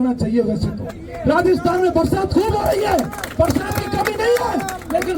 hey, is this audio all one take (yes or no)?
yes